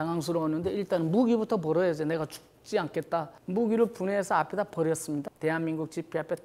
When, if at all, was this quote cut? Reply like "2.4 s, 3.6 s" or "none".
3.3 s, 5.3 s